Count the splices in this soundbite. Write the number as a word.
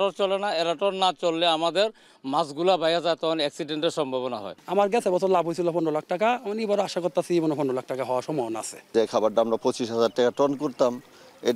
two